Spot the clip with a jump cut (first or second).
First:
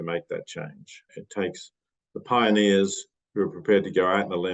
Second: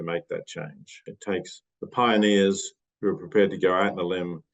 second